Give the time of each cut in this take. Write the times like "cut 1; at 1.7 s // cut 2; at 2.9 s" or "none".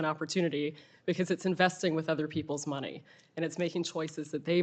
none